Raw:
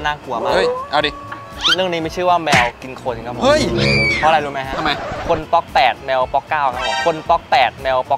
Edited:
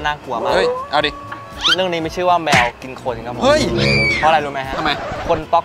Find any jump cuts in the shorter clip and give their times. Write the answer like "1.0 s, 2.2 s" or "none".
none